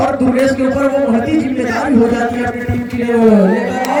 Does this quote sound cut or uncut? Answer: uncut